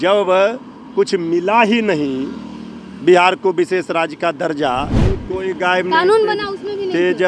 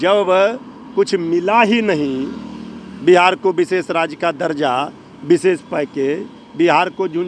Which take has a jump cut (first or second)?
first